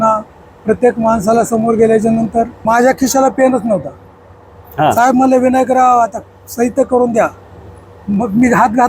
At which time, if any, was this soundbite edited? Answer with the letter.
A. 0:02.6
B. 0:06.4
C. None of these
A